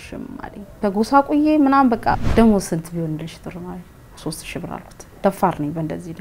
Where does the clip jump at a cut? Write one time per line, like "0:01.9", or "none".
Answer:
0:02.2